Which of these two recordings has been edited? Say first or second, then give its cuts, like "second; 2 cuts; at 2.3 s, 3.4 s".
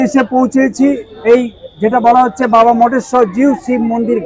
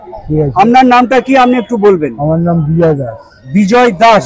first; 1 cut; at 1.1 s